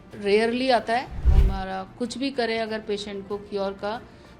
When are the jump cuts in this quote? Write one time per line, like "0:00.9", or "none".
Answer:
0:01.4